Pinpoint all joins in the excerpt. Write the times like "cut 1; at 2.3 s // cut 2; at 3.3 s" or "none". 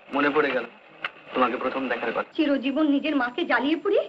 cut 1; at 2.3 s